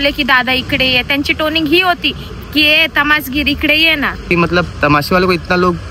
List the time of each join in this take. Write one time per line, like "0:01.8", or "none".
0:04.3